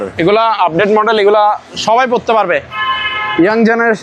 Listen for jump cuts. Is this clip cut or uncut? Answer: uncut